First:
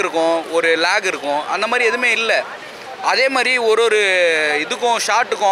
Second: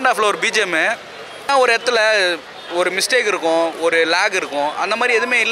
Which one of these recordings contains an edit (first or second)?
second